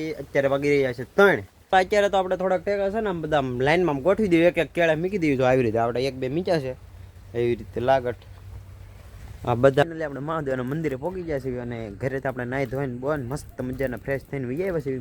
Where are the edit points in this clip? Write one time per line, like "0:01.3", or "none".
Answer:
0:01.7
0:09.8